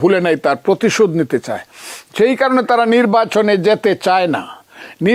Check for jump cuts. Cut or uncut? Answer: uncut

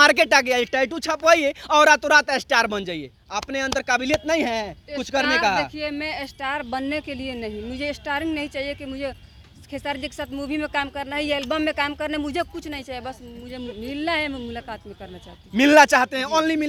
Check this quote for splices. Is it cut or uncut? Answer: uncut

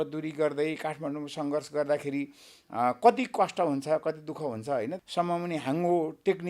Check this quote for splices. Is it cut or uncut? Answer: cut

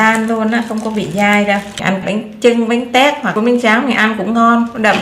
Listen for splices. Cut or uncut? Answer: cut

